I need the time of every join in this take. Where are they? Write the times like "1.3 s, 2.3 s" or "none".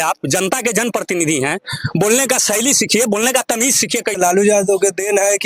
4.2 s

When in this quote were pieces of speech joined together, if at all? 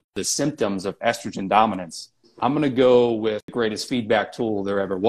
3.5 s

